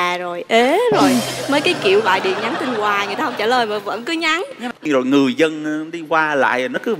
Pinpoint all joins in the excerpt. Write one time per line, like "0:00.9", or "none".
0:04.7